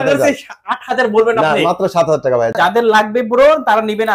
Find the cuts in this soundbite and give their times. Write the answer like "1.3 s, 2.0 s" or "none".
2.5 s